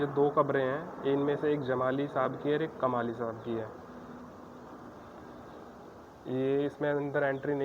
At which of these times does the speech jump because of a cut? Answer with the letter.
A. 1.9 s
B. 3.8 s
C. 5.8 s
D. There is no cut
D